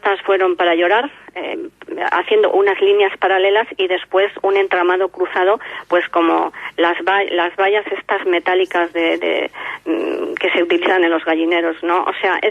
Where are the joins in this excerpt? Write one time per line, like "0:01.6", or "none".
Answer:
none